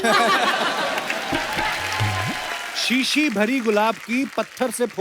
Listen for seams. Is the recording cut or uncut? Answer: cut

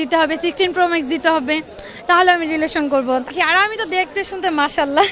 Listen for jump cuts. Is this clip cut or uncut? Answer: cut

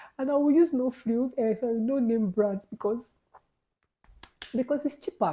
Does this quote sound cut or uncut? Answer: uncut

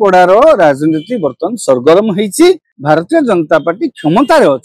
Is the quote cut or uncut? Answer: cut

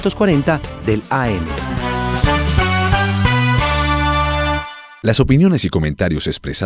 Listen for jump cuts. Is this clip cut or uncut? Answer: uncut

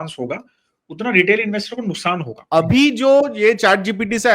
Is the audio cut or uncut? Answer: cut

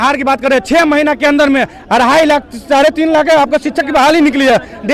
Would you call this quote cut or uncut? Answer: uncut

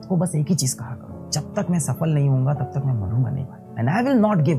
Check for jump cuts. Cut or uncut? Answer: cut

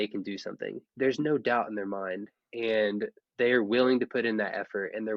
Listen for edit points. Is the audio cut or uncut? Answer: cut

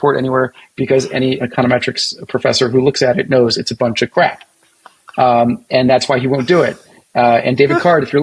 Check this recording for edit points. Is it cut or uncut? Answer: cut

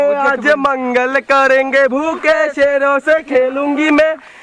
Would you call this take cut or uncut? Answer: uncut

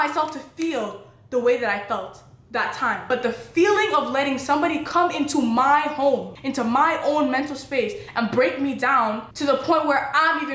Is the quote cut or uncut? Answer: cut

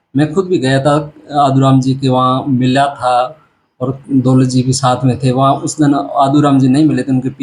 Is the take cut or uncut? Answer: uncut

